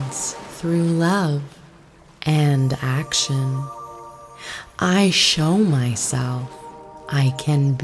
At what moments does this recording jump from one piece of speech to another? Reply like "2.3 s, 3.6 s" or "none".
none